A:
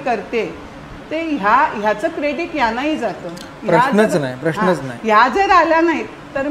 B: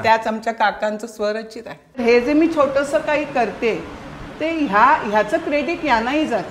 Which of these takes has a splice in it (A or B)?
B